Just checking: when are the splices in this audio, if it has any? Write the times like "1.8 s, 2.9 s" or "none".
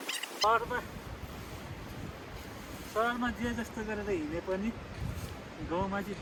none

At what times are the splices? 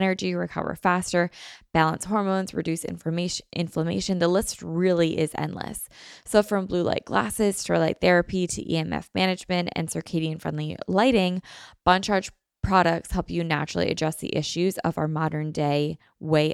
none

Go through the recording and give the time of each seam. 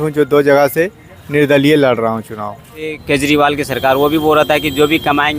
3.0 s

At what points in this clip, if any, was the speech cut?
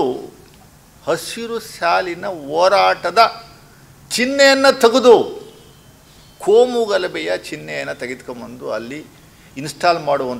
none

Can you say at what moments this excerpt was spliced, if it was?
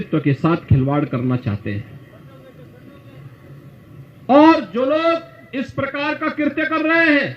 none

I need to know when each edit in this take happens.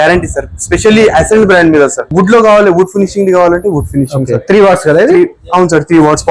2.1 s

